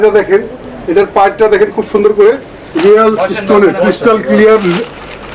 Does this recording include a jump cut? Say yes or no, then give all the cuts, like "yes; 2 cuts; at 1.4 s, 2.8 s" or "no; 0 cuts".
no; 0 cuts